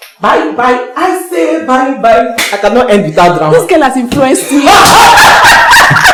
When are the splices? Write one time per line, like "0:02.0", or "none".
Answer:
none